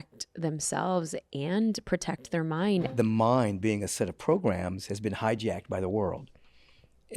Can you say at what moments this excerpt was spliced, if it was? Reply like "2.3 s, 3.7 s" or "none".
2.9 s